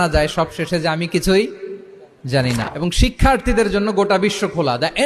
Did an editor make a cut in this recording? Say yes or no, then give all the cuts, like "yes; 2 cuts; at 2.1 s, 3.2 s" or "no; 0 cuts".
yes; 1 cut; at 2.6 s